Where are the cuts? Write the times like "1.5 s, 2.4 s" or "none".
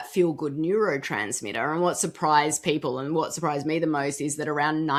none